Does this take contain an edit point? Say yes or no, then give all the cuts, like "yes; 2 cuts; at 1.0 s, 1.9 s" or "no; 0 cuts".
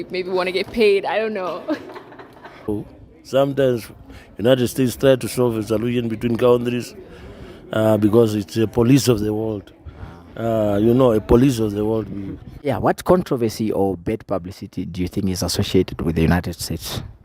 yes; 2 cuts; at 2.7 s, 12.7 s